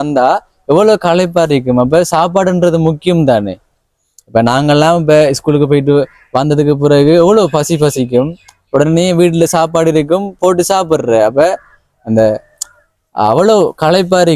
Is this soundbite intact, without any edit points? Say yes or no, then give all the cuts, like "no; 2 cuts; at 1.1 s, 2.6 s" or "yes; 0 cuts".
yes; 0 cuts